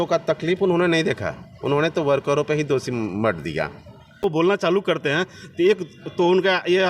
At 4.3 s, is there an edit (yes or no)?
yes